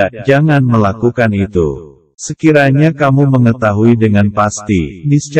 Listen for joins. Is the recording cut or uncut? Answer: uncut